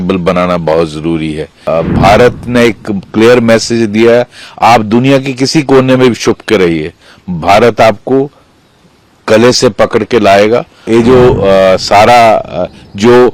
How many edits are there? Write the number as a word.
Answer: two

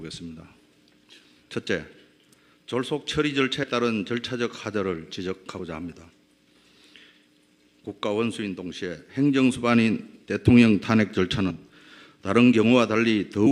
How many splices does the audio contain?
one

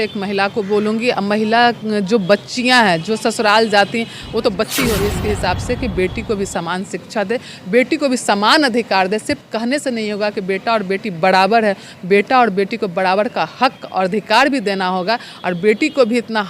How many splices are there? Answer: one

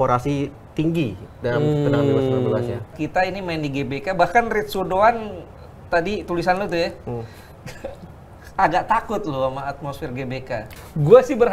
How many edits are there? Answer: two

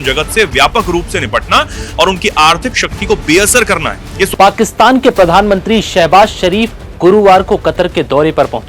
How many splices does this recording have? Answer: one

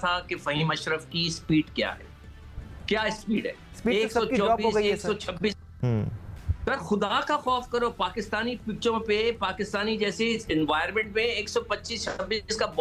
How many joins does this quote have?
zero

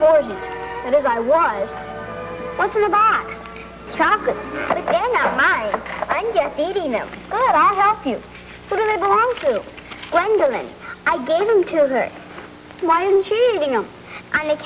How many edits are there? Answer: zero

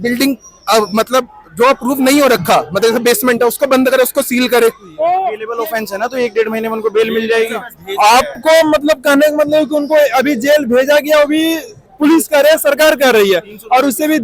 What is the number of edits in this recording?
one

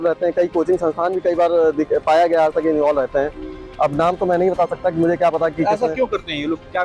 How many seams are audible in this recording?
zero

